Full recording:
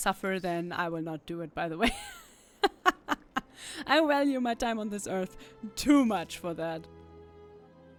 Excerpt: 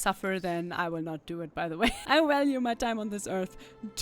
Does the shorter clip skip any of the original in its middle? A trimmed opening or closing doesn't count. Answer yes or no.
yes